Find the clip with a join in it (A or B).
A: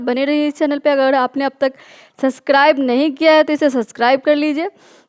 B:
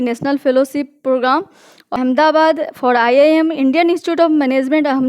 B